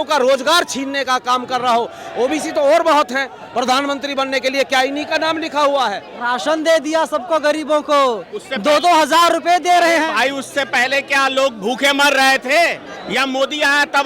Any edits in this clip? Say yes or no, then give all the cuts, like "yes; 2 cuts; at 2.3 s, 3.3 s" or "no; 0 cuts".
yes; 2 cuts; at 6.1 s, 12.9 s